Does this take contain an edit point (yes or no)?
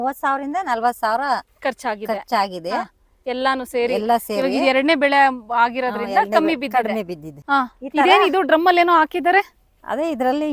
yes